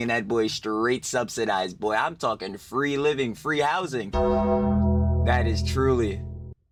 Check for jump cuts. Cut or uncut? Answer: uncut